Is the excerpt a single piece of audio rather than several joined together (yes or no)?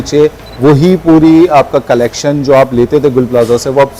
yes